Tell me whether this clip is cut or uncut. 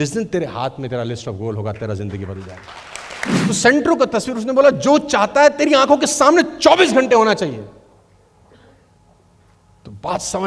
cut